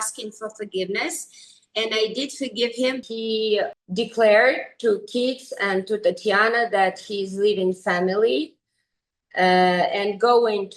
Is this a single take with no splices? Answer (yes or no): no